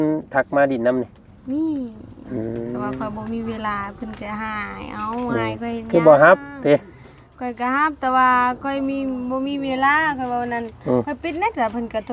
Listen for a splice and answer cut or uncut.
uncut